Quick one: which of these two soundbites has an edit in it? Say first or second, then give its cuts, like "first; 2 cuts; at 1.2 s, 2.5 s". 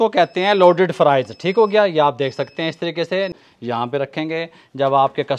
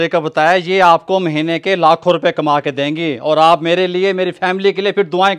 first; 1 cut; at 3.4 s